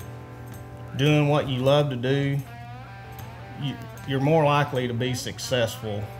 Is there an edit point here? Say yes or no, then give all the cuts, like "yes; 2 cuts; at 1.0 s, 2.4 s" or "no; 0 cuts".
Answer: no; 0 cuts